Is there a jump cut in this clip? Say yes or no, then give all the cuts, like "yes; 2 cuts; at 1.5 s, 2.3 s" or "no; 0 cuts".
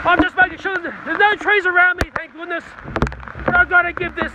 yes; 1 cut; at 2.8 s